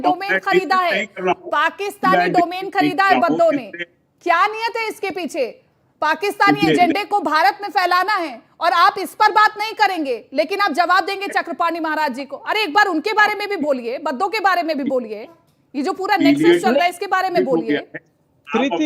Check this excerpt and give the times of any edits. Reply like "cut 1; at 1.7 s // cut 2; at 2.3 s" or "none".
none